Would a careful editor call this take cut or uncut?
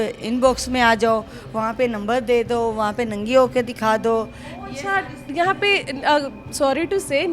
uncut